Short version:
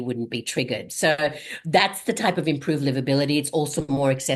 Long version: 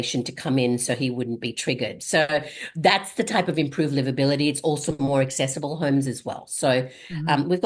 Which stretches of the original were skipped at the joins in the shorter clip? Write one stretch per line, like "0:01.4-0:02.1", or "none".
none